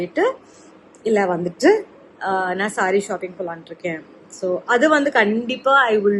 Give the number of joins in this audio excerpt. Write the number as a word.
zero